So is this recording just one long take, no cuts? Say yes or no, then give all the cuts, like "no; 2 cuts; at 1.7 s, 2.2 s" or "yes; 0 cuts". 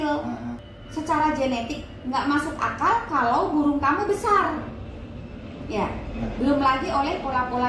yes; 0 cuts